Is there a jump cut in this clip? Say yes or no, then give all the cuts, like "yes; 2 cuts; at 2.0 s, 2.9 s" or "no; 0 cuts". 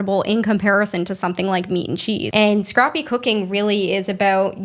yes; 1 cut; at 2.3 s